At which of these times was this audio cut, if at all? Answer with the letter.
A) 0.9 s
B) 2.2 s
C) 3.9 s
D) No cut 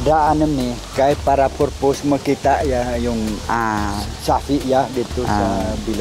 D